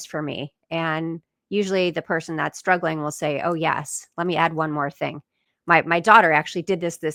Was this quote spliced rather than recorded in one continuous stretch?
no; 0 cuts

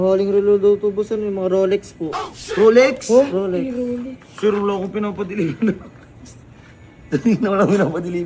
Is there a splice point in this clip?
no; 0 cuts

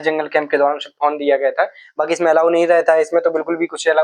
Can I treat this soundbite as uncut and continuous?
yes; 0 cuts

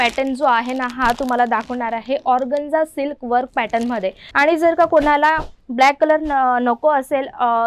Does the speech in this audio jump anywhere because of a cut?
yes; 1 cut; at 4.2 s

